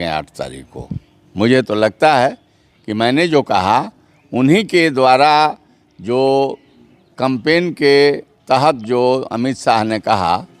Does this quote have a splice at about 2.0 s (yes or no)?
no